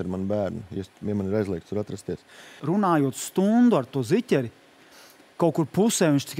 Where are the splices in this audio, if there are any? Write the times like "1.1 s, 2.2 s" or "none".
2.5 s